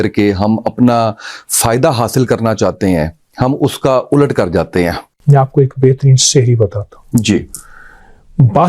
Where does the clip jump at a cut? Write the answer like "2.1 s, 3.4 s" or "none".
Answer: 5.1 s